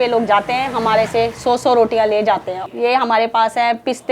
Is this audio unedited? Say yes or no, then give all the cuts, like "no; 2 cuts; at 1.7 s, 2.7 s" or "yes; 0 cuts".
yes; 0 cuts